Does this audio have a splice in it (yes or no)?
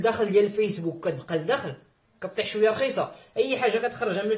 no